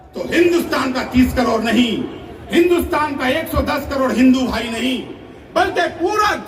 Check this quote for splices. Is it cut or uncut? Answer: uncut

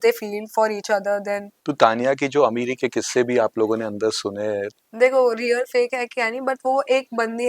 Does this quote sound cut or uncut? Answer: cut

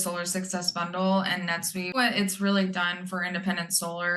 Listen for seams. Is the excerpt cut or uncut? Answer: cut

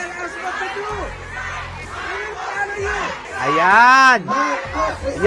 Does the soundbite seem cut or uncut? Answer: cut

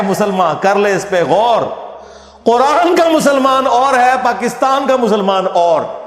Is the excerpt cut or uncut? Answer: uncut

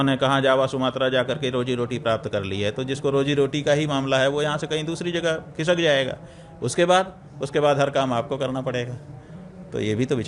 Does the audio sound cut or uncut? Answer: uncut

